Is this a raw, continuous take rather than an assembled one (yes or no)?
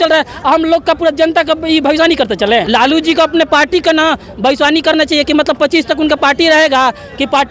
no